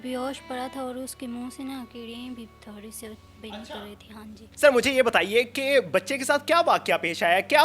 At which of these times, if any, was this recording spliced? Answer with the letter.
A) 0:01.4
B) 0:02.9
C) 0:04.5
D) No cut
C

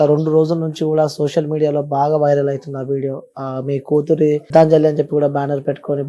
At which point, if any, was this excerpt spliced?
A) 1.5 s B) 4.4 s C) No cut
B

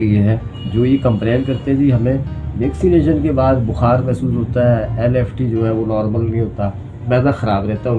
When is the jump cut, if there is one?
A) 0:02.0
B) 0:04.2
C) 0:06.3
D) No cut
D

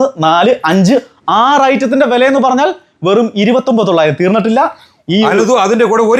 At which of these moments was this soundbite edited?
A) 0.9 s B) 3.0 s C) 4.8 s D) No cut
D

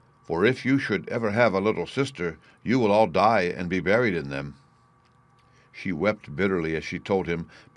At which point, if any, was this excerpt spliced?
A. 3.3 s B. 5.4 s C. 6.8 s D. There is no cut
B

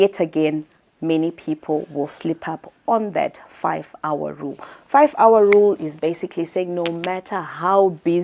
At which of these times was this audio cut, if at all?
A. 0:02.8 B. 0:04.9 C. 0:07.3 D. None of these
D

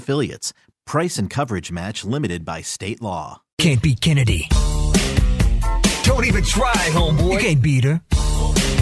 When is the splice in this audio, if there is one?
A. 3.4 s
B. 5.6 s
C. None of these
A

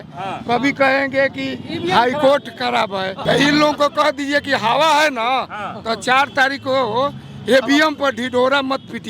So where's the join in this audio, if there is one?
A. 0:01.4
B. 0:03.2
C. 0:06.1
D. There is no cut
B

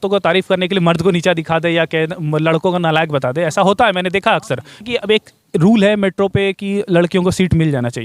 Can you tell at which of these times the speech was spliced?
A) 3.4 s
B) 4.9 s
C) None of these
B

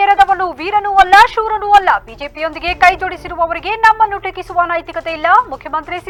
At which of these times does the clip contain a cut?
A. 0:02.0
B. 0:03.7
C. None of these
C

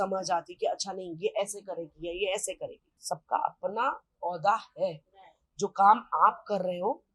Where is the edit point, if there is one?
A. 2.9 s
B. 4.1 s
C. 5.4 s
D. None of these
A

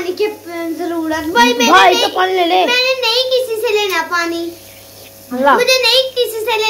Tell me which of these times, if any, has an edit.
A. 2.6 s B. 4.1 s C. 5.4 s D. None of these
C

